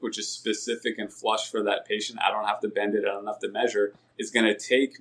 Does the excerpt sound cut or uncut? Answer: uncut